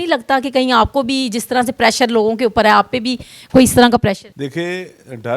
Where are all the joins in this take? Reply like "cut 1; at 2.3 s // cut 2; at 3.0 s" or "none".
cut 1; at 4.3 s